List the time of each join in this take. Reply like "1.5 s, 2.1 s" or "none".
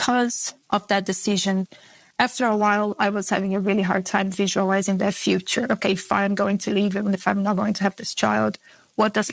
1.8 s

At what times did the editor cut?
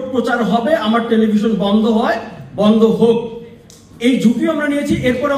none

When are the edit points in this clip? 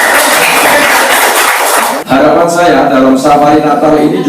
1.9 s

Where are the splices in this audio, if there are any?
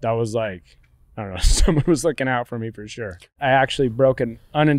3.3 s

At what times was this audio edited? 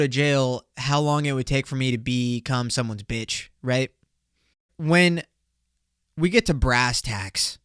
4.7 s

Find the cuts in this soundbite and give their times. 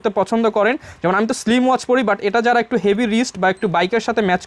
none

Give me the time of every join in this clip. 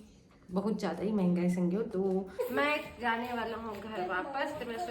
2.4 s

